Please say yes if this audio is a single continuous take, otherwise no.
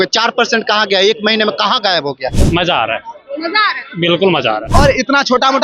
no